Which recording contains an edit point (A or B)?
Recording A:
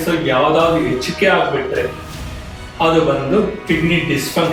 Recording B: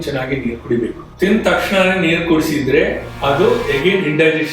B